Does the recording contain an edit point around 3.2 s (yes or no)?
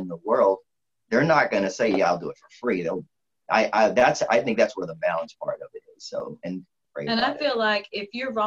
yes